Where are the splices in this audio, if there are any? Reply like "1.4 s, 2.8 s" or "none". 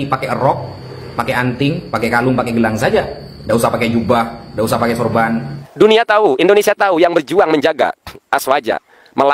5.6 s